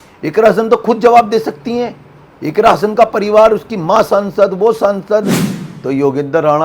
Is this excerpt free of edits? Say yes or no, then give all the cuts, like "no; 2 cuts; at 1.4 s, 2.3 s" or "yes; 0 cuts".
no; 1 cut; at 5.4 s